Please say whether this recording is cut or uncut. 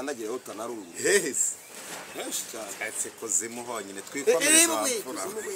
uncut